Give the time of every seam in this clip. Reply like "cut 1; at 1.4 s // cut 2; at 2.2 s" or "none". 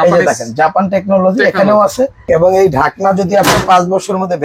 cut 1; at 2.2 s